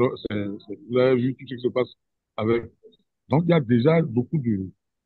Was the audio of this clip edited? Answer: no; 0 cuts

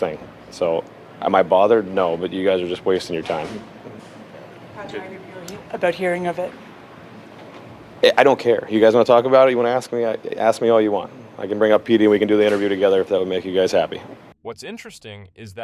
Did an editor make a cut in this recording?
no; 0 cuts

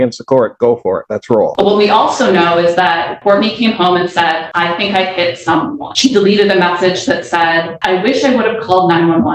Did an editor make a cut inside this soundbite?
yes; 5 cuts; at 1.5 s, 3.1 s, 4.5 s, 5.8 s, 7.7 s

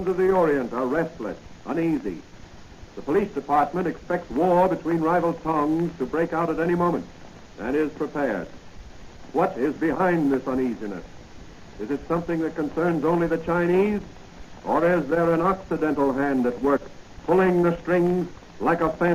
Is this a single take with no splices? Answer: no; 1 cut; at 5.9 s

